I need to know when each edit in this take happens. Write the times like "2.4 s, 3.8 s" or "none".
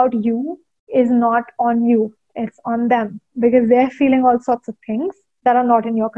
5.2 s